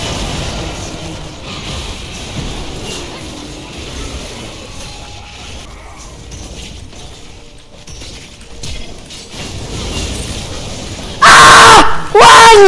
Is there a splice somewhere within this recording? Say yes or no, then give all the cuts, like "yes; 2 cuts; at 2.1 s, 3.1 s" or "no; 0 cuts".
yes; 2 cuts; at 5.7 s, 11.0 s